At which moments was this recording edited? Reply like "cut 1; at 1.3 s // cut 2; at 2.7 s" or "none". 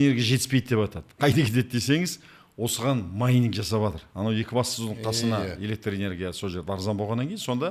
none